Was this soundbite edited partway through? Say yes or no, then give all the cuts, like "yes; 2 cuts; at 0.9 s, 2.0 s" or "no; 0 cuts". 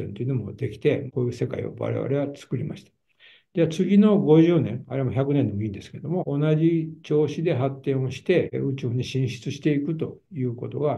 yes; 2 cuts; at 1.1 s, 8.5 s